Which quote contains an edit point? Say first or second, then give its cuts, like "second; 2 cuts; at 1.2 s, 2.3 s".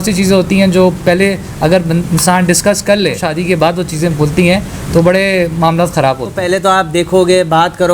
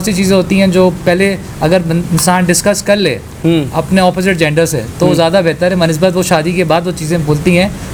first; 2 cuts; at 3.3 s, 6.3 s